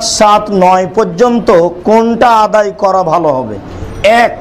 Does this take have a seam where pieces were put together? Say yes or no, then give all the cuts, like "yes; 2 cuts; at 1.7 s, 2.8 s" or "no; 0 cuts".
no; 0 cuts